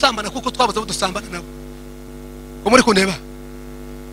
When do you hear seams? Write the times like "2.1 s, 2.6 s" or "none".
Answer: 2.1 s